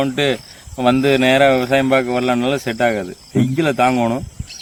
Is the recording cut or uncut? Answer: uncut